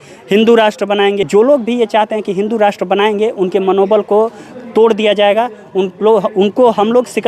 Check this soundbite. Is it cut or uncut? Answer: cut